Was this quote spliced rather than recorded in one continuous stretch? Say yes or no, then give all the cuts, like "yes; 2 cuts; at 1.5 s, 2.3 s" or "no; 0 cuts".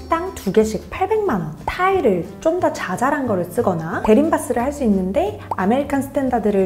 yes; 1 cut; at 1.6 s